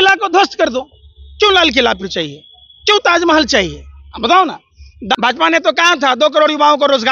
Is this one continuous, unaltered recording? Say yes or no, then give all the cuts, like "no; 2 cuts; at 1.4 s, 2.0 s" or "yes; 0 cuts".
no; 1 cut; at 5.2 s